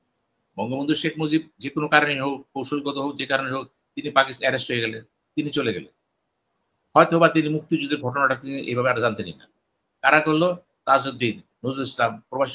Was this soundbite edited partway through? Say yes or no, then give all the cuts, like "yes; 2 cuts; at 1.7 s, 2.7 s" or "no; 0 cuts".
no; 0 cuts